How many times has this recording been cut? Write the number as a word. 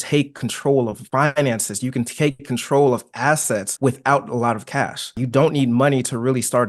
three